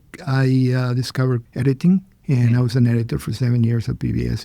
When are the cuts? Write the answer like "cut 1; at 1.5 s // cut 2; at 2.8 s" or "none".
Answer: cut 1; at 1.5 s // cut 2; at 2.1 s